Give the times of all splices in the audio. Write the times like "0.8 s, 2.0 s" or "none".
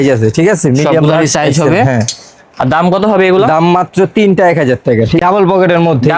5.2 s